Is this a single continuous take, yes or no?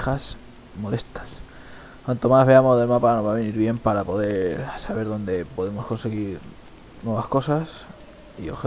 no